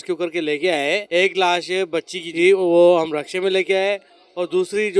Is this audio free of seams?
no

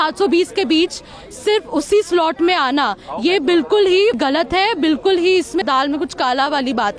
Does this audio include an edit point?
yes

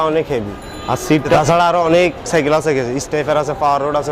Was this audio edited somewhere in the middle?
yes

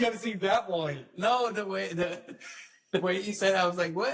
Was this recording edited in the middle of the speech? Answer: no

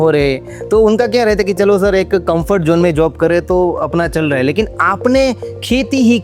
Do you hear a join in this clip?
no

